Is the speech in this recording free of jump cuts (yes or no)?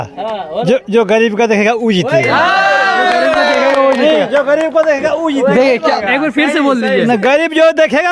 yes